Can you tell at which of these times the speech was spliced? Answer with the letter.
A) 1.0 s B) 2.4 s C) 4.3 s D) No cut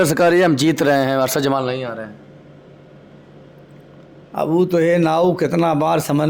D